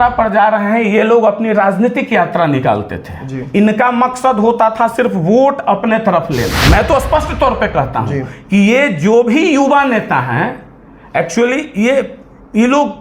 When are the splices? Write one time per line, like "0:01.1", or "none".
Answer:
0:06.6